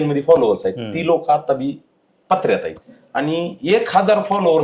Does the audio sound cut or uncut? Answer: cut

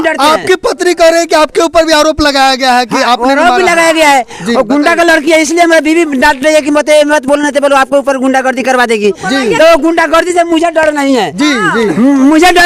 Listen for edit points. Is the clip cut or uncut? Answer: uncut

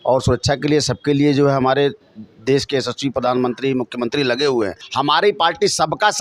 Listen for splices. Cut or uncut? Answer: cut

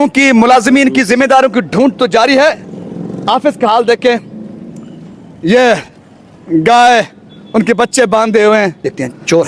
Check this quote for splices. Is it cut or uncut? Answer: uncut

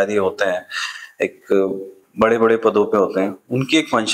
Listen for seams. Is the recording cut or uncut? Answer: uncut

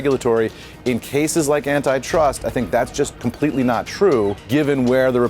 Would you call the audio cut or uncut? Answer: cut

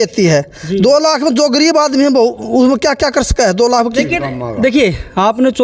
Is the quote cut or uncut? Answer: cut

